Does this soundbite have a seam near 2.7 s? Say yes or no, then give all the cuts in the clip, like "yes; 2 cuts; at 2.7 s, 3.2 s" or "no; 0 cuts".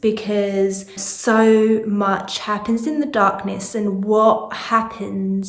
no; 1 cut; at 1.1 s